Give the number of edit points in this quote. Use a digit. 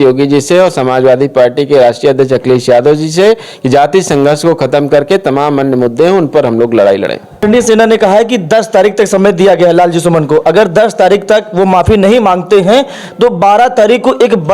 1